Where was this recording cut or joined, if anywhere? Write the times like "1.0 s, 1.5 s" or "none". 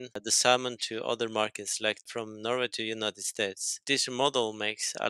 2.1 s, 3.7 s